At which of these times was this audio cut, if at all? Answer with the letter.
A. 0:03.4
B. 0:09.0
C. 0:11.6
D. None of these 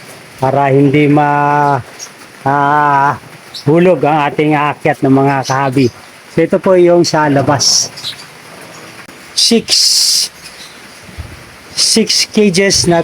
B